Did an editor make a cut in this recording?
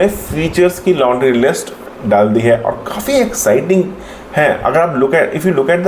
no; 0 cuts

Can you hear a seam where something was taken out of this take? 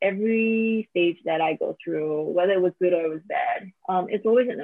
yes; 1 cut; at 3.7 s

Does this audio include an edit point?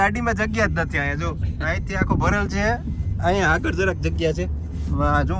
no; 0 cuts

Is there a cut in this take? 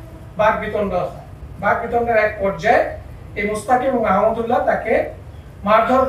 no; 0 cuts

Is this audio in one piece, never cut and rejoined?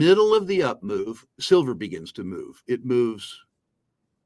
yes; 0 cuts

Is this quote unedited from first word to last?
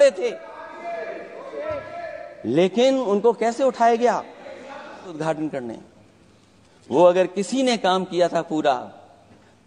no; 1 cut; at 5.2 s

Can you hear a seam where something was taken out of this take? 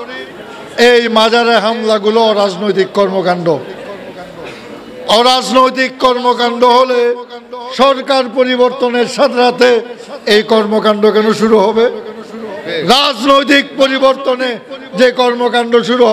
no; 0 cuts

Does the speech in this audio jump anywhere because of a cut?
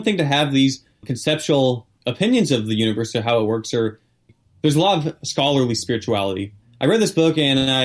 yes; 4 cuts; at 1.1 s, 1.9 s, 4.3 s, 6.6 s

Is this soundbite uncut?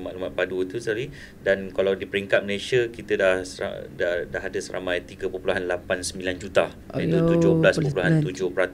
yes; 0 cuts

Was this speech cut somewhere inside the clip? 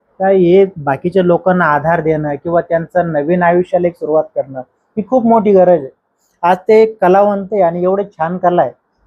no; 0 cuts

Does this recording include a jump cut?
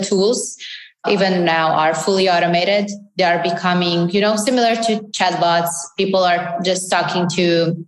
yes; 1 cut; at 1.0 s

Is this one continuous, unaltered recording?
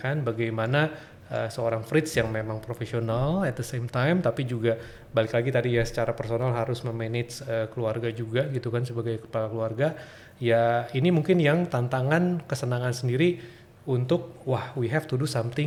yes; 0 cuts

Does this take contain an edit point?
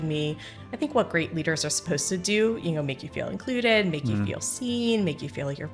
no; 0 cuts

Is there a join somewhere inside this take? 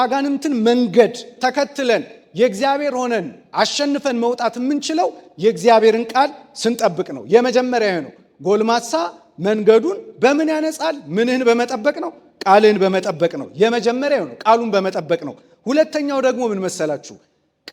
no; 0 cuts

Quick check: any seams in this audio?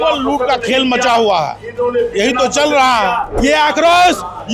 yes; 1 cut; at 3.3 s

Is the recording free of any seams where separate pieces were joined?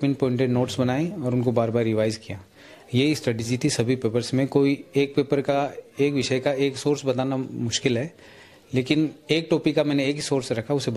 yes; 0 cuts

